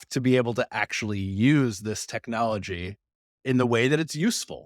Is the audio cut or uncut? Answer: cut